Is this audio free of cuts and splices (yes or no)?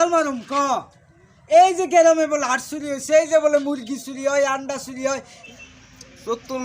no